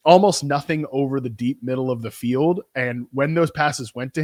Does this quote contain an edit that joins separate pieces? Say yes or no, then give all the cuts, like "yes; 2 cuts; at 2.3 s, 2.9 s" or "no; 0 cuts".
no; 0 cuts